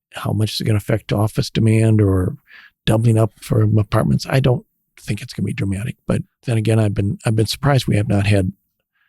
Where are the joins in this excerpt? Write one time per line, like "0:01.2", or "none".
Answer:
0:06.3